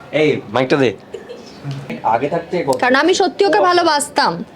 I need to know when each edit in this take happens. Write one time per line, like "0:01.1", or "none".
0:02.0